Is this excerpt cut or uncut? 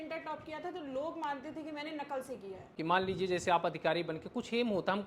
cut